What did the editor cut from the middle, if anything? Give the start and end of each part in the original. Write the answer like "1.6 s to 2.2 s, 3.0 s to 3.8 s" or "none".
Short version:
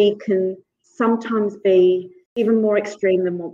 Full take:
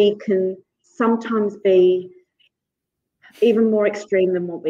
2.4 s to 3.5 s